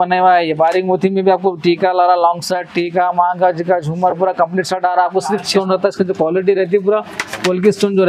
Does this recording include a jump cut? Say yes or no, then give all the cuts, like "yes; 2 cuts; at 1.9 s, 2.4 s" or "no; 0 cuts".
yes; 1 cut; at 5.5 s